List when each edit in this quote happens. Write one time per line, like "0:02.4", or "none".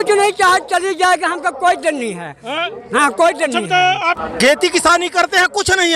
0:03.8